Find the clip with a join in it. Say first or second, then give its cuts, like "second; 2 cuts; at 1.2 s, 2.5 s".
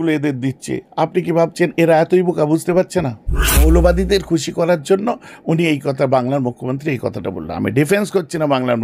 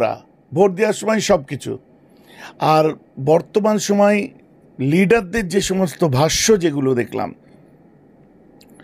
first; 1 cut; at 3.6 s